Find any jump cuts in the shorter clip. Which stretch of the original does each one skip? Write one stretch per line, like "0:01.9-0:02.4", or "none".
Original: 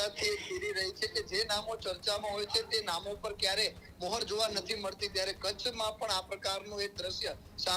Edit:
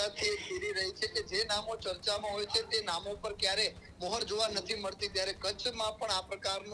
none